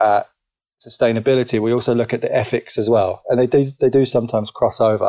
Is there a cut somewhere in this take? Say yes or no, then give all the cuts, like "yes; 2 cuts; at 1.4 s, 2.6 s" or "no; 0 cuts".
no; 0 cuts